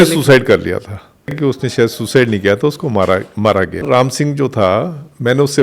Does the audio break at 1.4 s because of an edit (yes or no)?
yes